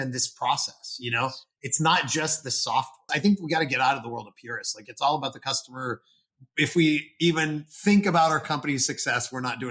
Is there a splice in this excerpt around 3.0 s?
yes; 1 cut; at 3.0 s

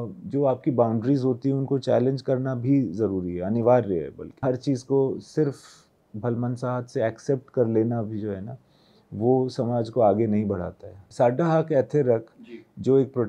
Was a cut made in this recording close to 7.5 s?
no; 2 cuts; at 4.4 s, 11.0 s

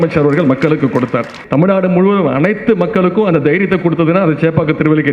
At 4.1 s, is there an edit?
no; 1 cut; at 1.4 s

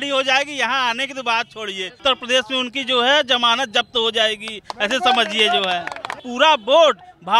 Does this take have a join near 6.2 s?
yes; 2 cuts; at 2.0 s, 6.2 s

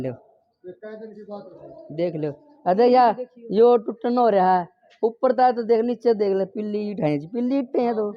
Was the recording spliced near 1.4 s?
no; 0 cuts

